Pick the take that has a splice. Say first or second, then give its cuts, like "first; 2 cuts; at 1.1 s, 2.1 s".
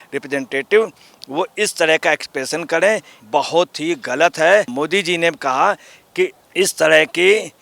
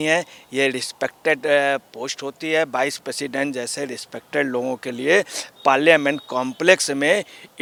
first; 3 cuts; at 3.1 s, 4.7 s, 6.4 s